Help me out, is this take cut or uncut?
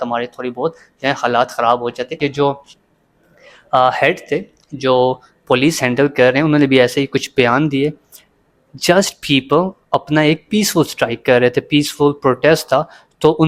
cut